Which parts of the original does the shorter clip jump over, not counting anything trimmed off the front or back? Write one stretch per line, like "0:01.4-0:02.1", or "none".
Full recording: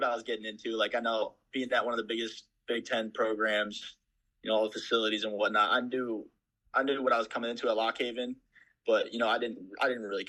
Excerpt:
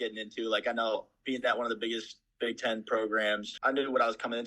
0:03.8-0:06.6